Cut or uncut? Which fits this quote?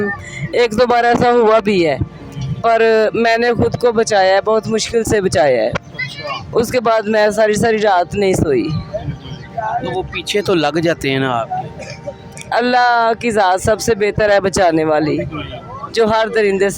uncut